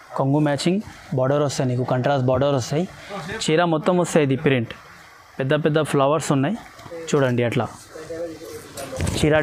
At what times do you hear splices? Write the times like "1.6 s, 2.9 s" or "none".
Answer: none